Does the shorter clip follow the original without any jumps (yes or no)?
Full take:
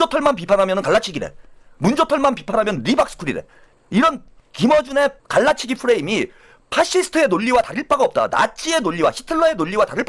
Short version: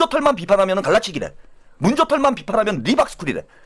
yes